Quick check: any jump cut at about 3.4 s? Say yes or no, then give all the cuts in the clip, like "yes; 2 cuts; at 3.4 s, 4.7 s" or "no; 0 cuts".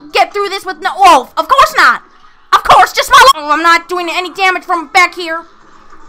yes; 1 cut; at 3.4 s